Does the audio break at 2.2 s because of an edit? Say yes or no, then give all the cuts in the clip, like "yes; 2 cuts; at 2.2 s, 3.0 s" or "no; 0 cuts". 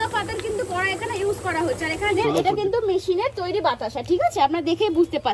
yes; 1 cut; at 2.2 s